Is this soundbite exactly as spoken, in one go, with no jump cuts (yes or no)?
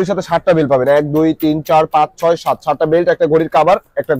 yes